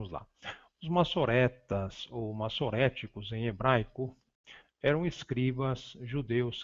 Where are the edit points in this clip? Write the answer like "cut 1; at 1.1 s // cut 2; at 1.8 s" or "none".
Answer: cut 1; at 3.0 s